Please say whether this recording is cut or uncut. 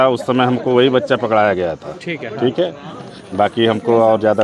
uncut